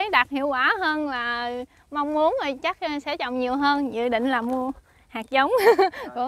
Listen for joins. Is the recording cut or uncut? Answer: uncut